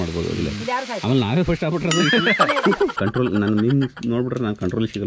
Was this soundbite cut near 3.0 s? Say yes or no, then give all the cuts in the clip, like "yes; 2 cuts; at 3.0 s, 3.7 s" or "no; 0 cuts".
yes; 1 cut; at 3.0 s